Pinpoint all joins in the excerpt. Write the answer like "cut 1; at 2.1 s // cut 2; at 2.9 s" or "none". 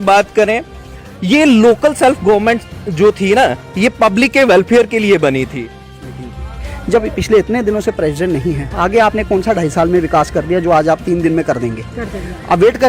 cut 1; at 6.1 s